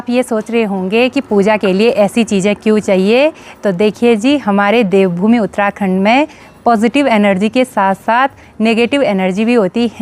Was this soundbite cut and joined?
no; 0 cuts

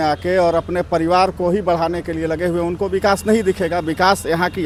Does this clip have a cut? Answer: no; 0 cuts

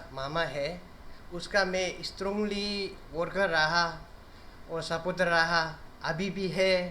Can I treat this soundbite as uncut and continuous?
yes; 0 cuts

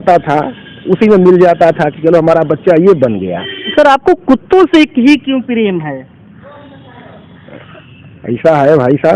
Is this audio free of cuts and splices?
no; 1 cut; at 3.7 s

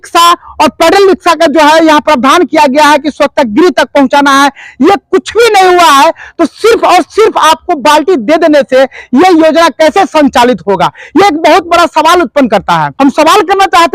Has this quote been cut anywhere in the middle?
yes; 1 cut; at 12.9 s

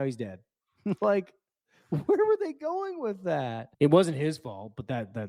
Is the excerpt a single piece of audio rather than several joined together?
no; 1 cut; at 3.6 s

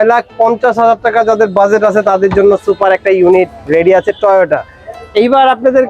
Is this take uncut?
yes; 0 cuts

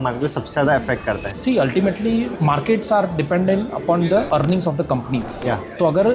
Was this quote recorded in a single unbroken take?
no; 2 cuts; at 1.3 s, 4.3 s

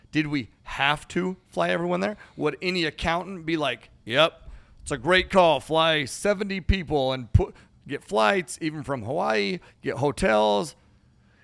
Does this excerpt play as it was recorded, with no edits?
yes; 0 cuts

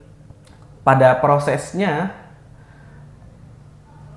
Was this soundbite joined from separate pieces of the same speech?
no; 0 cuts

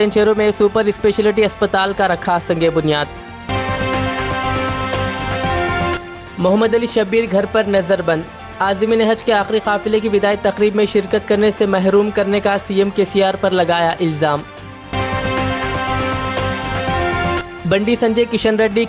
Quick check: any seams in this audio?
no; 0 cuts

